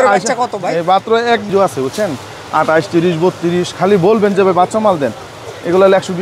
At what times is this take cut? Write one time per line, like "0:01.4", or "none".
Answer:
0:01.5